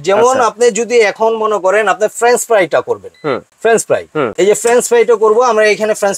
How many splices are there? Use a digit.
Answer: 2